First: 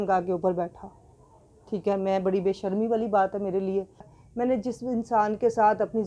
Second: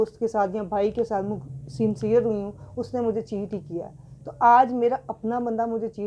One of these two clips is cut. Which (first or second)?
first